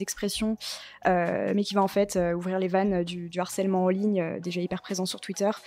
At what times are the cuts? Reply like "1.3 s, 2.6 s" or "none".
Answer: none